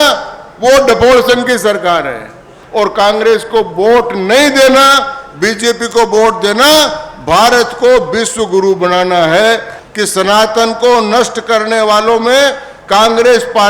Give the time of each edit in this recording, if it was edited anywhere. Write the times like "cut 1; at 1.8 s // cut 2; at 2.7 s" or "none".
cut 1; at 2.5 s // cut 2; at 9.7 s